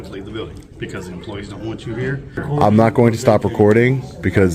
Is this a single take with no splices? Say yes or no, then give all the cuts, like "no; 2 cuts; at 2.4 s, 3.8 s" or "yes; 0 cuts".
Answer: no; 1 cut; at 2.4 s